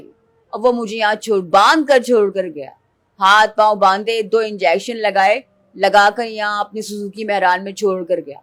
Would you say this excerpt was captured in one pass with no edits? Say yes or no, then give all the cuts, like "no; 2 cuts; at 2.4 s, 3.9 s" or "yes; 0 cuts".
yes; 0 cuts